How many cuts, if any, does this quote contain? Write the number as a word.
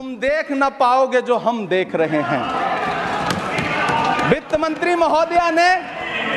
zero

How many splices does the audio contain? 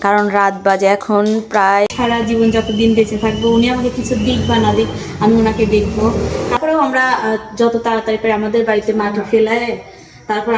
two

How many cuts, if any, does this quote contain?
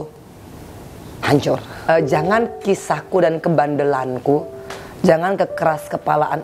one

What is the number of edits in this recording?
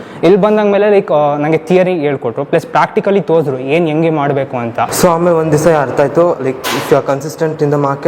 one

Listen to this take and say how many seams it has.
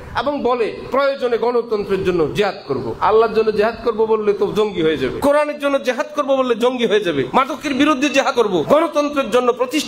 four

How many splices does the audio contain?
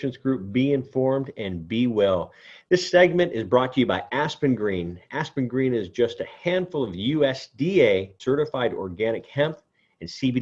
one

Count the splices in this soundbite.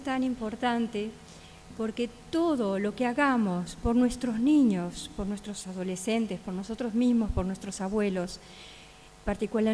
one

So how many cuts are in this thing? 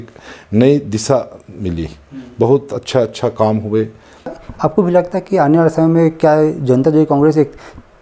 one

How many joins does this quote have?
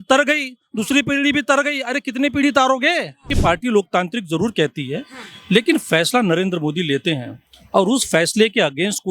one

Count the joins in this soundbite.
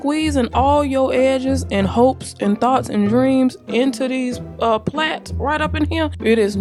zero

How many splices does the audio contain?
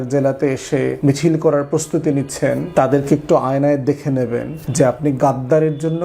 three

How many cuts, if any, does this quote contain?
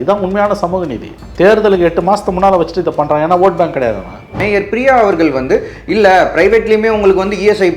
two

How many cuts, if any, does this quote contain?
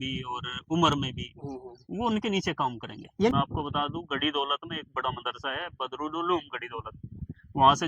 one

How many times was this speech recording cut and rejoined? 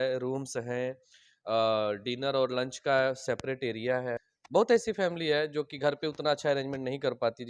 one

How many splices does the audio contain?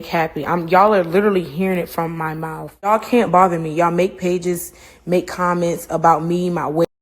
one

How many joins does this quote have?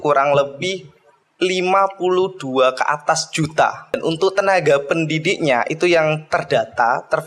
one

